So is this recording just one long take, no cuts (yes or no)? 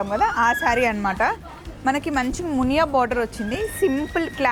yes